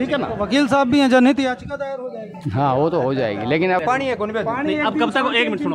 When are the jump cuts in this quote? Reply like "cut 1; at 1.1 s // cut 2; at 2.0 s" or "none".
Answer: cut 1; at 3.8 s